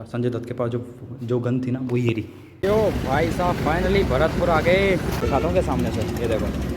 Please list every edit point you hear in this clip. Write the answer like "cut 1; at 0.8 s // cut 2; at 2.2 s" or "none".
cut 1; at 2.6 s // cut 2; at 5.2 s